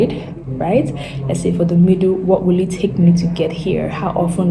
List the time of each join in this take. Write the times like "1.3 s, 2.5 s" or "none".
none